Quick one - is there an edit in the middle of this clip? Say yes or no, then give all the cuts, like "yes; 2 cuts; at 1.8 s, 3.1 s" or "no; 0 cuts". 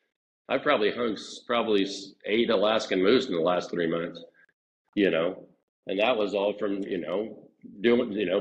no; 0 cuts